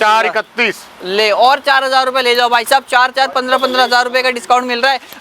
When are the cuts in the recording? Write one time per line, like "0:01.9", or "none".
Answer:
none